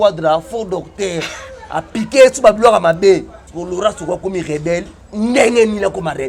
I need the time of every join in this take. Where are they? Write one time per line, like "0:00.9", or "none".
0:03.4
0:05.0